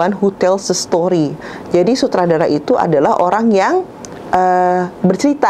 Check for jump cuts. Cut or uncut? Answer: uncut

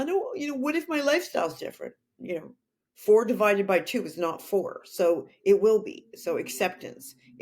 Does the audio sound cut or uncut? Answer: uncut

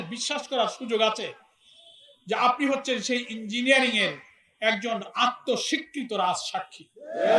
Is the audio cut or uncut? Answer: uncut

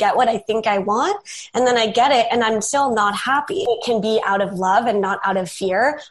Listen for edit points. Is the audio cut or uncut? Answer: cut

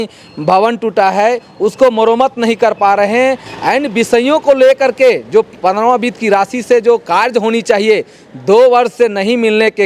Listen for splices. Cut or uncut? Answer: uncut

